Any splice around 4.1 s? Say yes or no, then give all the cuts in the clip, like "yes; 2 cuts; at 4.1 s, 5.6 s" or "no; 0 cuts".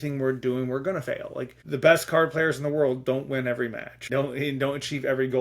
yes; 2 cuts; at 1.6 s, 4.1 s